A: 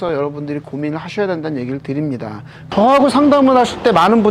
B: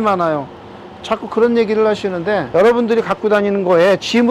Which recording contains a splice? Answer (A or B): A